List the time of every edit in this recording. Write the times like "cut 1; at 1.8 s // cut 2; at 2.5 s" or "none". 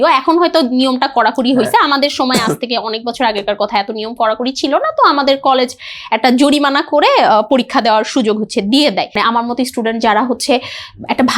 cut 1; at 9.2 s

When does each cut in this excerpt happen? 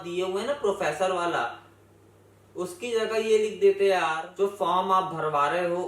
cut 1; at 4.2 s

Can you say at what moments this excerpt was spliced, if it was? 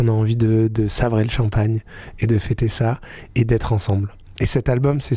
none

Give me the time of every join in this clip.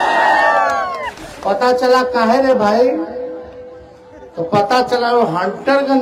none

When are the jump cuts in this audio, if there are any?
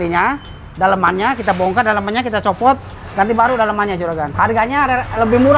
cut 1; at 4.3 s

